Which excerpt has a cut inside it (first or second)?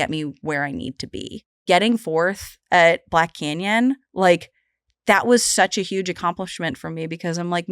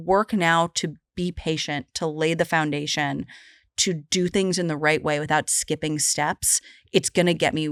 first